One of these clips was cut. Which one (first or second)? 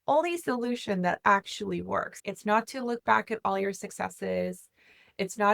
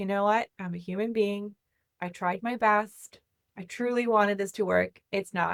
first